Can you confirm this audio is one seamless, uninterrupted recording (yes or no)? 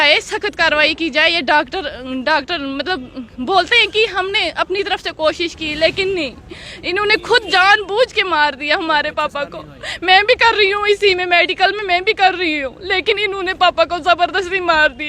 yes